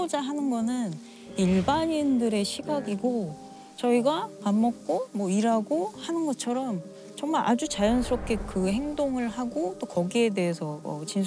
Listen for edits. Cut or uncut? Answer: uncut